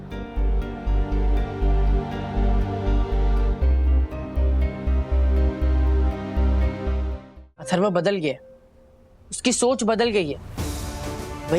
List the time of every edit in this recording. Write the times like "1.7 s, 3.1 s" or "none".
7.5 s